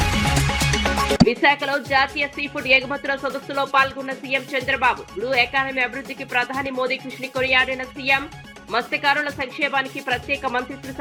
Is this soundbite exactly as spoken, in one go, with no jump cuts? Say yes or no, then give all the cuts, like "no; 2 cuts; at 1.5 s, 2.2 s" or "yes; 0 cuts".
yes; 0 cuts